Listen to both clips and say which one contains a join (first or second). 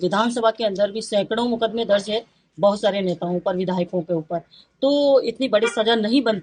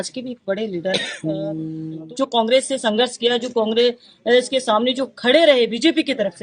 second